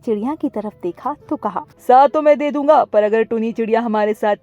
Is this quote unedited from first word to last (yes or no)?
no